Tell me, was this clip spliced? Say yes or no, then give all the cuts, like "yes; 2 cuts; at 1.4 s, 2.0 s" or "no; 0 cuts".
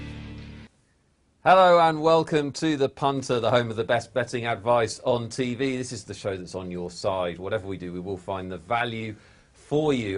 no; 0 cuts